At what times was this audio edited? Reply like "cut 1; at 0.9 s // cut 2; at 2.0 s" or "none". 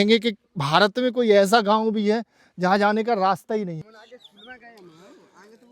cut 1; at 3.8 s